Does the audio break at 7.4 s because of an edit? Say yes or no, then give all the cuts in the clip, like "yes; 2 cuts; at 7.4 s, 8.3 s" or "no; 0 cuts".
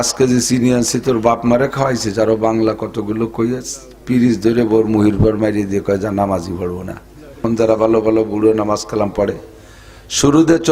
yes; 1 cut; at 7.4 s